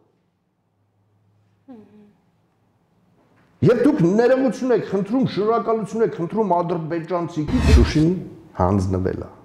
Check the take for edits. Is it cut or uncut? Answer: cut